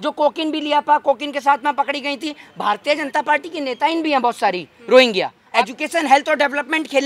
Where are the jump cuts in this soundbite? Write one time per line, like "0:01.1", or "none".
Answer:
0:05.4